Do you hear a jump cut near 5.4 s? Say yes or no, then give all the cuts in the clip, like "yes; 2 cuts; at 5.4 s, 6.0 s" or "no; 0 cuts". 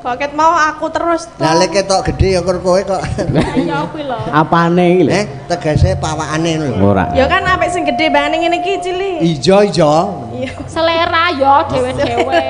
no; 0 cuts